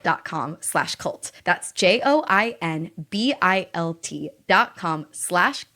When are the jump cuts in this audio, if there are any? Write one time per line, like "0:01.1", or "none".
0:01.3